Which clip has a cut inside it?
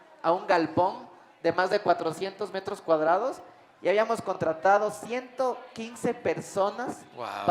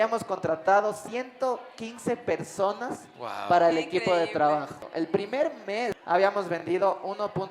second; 2 cuts; at 4.8 s, 6.0 s

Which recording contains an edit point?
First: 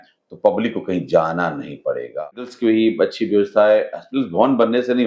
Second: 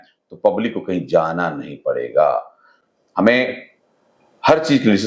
first; 1 cut; at 2.1 s

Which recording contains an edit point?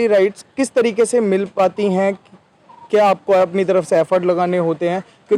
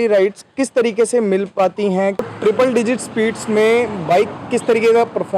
second; 1 cut; at 2.3 s

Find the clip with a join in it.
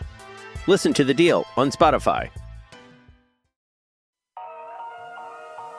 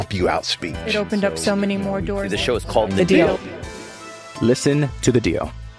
first; 1 cut; at 4.2 s

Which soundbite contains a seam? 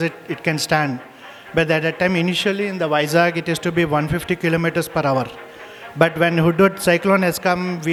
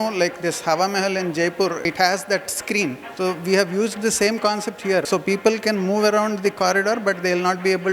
second; 3 cuts; at 1.8 s, 3.0 s, 5.1 s

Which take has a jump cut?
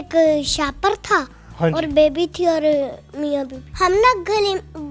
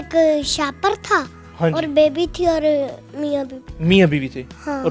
first; 1 cut; at 3.6 s

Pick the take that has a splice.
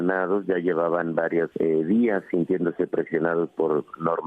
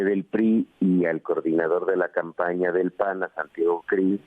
first; 1 cut; at 1.5 s

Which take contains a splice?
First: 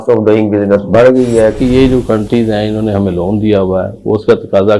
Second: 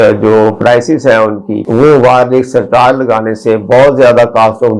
first; 1 cut; at 1.6 s

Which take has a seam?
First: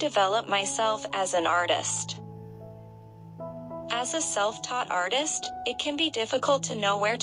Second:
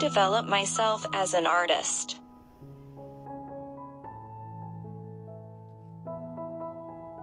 first; 2 cuts; at 1.9 s, 3.9 s

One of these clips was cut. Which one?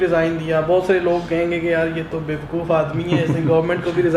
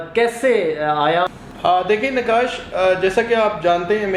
second; 1 cut; at 1.3 s

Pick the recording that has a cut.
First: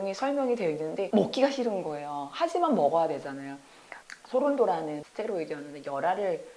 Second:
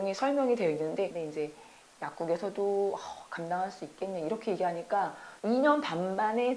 second; 2 cuts; at 1.1 s, 5.3 s

